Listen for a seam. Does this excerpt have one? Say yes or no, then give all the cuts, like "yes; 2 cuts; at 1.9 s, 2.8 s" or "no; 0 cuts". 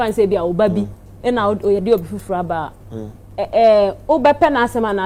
no; 0 cuts